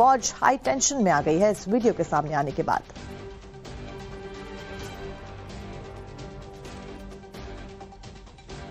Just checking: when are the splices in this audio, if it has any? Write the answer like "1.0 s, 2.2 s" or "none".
4.6 s